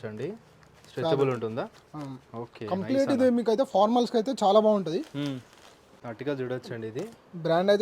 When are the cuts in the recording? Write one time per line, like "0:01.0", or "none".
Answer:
0:06.0